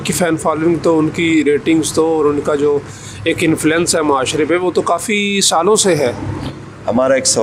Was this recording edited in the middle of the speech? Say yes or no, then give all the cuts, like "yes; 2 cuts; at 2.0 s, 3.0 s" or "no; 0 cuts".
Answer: no; 0 cuts